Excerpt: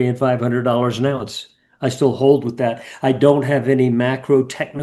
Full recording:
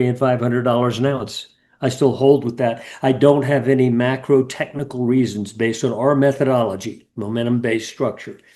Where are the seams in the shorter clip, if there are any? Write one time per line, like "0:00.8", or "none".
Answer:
none